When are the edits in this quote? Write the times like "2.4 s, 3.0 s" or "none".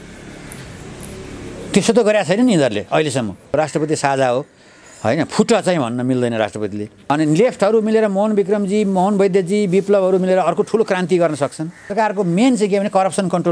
3.5 s, 6.9 s, 11.9 s